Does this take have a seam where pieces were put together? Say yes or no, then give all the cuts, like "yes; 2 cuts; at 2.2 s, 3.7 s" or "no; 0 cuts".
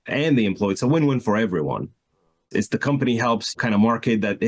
yes; 2 cuts; at 2.5 s, 3.5 s